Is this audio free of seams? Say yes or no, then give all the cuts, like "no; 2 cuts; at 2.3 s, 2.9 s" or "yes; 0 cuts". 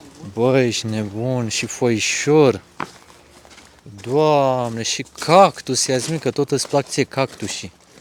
yes; 0 cuts